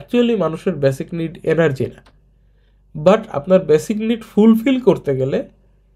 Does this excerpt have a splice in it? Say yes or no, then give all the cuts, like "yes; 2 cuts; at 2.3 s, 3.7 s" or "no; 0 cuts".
no; 0 cuts